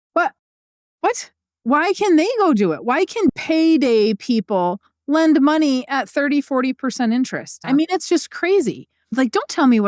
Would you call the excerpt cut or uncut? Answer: cut